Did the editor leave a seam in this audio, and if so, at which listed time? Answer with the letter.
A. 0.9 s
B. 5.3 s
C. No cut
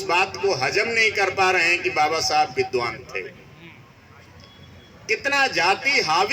C